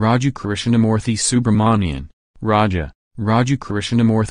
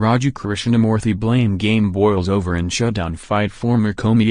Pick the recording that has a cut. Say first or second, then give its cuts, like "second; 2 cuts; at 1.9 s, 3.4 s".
second; 1 cut; at 0.9 s